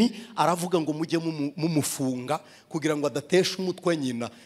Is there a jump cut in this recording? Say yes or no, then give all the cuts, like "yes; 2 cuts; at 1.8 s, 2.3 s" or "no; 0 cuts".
no; 0 cuts